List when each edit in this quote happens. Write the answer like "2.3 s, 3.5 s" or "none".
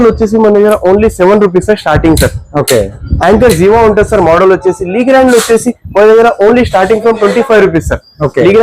none